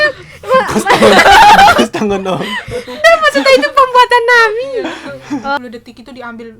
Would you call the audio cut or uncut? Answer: cut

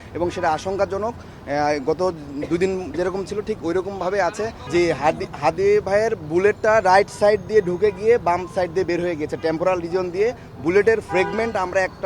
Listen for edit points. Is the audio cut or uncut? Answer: cut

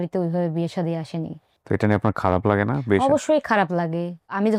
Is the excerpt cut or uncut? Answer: uncut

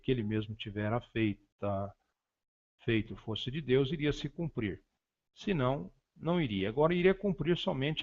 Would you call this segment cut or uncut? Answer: uncut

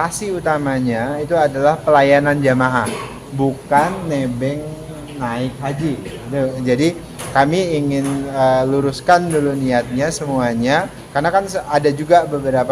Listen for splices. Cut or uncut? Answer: cut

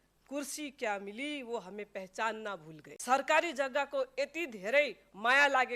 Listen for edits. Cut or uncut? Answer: cut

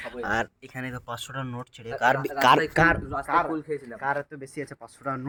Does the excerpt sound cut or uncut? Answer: uncut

